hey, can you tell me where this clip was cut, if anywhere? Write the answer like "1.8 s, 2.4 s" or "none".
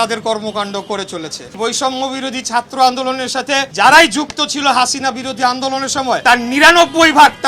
1.5 s, 3.7 s, 6.2 s

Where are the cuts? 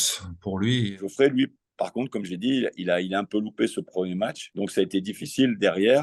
1.0 s

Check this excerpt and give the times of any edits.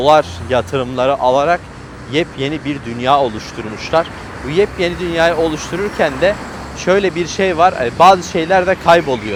none

